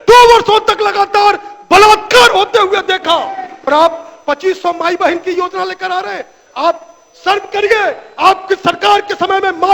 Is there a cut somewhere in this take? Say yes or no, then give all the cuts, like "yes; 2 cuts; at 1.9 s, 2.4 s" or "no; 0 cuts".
yes; 1 cut; at 3.5 s